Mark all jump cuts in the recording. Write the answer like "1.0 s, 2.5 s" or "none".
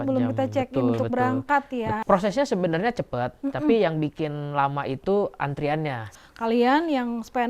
2.0 s, 6.1 s